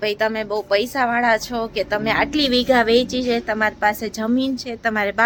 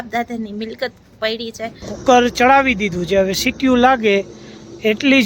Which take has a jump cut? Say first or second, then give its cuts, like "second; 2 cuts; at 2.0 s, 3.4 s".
second; 1 cut; at 1.9 s